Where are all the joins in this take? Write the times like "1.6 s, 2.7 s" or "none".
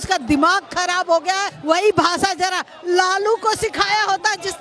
1.5 s